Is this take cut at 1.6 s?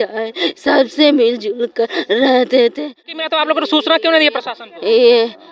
no; 1 cut; at 3.2 s

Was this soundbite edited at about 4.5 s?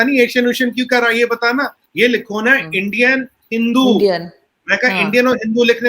no; 1 cut; at 1.8 s

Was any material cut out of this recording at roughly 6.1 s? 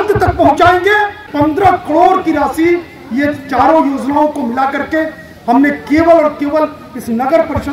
no; 1 cut; at 1.3 s

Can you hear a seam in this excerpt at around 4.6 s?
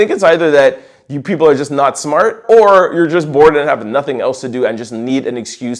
no; 1 cut; at 2.4 s

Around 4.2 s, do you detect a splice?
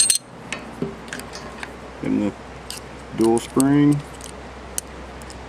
yes; 1 cut; at 4.2 s

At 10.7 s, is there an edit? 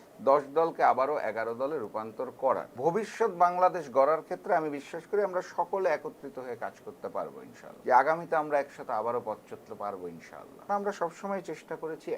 yes; 3 cuts; at 2.7 s, 7.7 s, 10.7 s

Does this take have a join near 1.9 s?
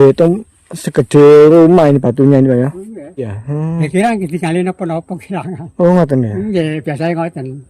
no; 1 cut; at 3.4 s

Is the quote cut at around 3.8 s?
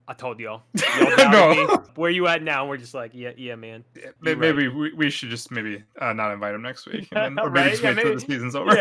no; 1 cut; at 1.9 s

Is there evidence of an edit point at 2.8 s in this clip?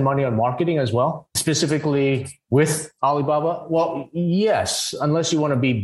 yes; 2 cuts; at 1.4 s, 2.8 s

